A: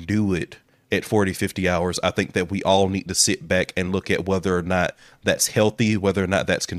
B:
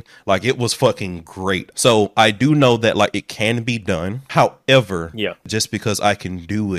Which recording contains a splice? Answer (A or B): B